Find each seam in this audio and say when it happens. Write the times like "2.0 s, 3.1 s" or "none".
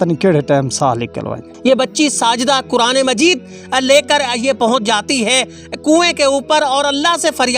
1.5 s